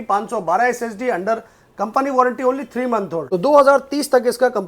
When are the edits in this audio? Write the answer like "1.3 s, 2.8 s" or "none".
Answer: 3.2 s